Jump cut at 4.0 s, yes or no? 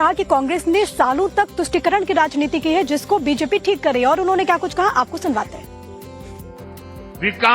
yes